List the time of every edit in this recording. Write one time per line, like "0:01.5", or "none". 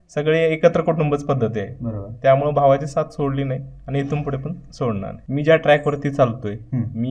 0:05.1